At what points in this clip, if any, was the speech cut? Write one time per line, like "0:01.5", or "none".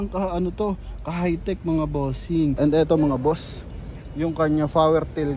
0:02.5